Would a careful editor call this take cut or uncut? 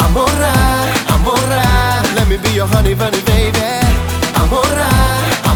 uncut